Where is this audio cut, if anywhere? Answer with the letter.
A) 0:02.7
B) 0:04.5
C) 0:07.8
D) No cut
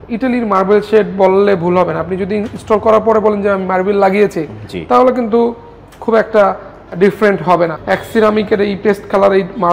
C